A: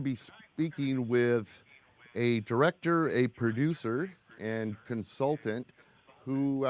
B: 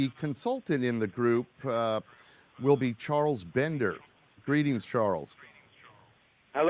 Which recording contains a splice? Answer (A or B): A